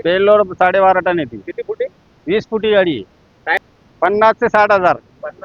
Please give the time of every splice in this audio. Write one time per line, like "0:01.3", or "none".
0:03.6